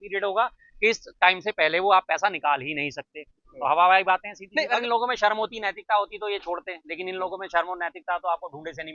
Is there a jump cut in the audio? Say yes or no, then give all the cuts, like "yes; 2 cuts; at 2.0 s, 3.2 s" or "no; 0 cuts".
yes; 1 cut; at 4.8 s